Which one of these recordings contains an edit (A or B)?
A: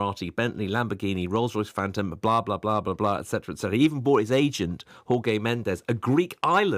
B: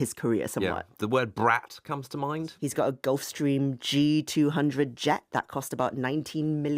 B